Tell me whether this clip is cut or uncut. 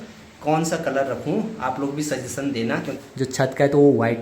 cut